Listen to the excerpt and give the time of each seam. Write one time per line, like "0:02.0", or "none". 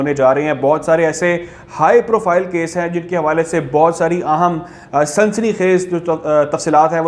none

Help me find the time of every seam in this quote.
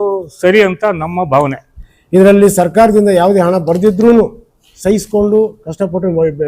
0:01.5

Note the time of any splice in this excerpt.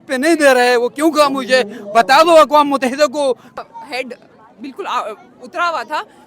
0:03.6

